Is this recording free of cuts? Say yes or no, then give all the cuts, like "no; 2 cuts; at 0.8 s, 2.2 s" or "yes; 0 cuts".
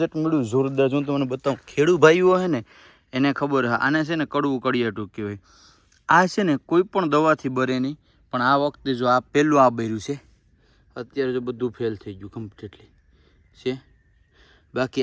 yes; 0 cuts